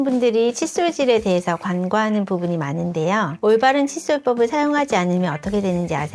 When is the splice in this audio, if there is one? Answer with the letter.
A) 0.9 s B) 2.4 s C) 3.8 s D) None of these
D